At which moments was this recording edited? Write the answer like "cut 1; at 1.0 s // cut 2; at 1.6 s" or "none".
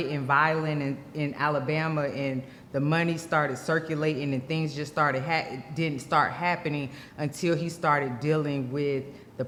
none